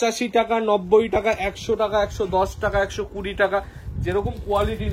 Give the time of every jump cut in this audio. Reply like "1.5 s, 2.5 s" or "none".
none